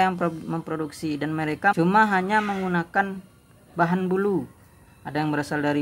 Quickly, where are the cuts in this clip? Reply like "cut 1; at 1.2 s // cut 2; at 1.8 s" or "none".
cut 1; at 1.7 s